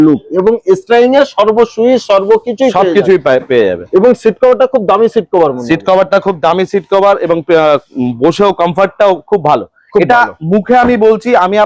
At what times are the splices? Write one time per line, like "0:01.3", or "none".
none